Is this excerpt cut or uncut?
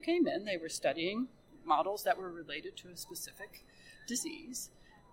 cut